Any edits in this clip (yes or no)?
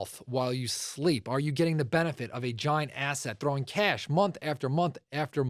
no